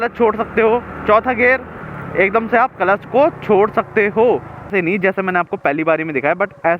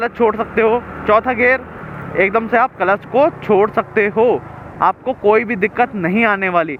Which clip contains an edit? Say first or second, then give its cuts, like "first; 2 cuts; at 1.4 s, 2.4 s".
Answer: first; 1 cut; at 4.7 s